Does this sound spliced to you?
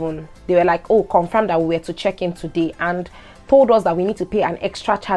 no; 0 cuts

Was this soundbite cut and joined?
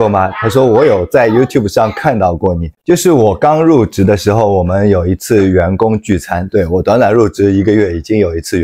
yes; 1 cut; at 2.7 s

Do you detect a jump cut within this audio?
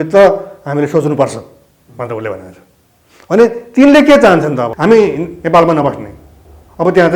yes; 1 cut; at 4.7 s

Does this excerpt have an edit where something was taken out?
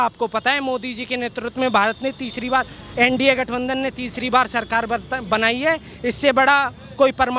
no; 0 cuts

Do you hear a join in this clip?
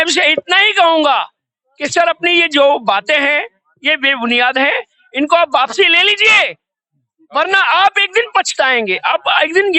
no; 0 cuts

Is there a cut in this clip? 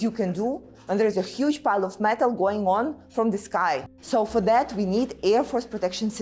yes; 1 cut; at 3.9 s

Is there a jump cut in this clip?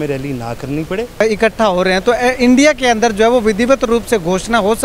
yes; 1 cut; at 1.2 s

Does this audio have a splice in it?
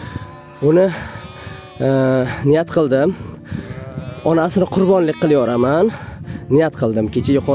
no; 0 cuts

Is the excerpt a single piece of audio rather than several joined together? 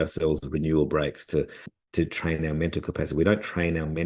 no; 1 cut; at 1.7 s

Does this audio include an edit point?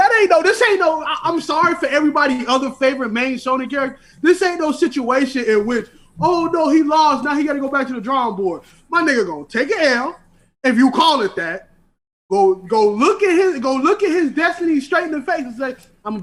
no; 0 cuts

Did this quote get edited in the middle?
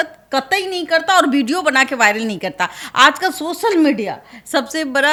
no; 0 cuts

